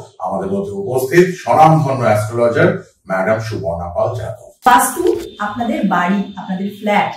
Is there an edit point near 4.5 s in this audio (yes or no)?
yes